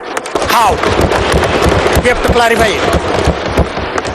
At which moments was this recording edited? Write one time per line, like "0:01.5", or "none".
none